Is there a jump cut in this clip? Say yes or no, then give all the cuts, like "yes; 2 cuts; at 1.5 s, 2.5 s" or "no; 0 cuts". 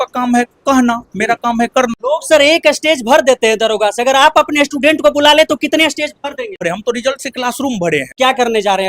yes; 3 cuts; at 2.0 s, 6.6 s, 8.1 s